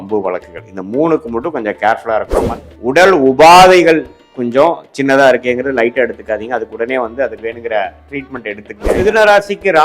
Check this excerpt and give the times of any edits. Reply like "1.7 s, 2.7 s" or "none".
2.4 s, 9.0 s